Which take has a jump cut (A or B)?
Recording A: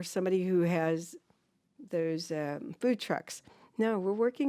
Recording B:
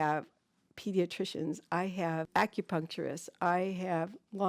B